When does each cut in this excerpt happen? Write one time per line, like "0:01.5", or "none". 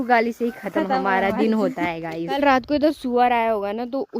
0:02.3